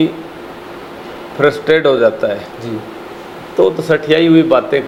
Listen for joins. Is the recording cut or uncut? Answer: uncut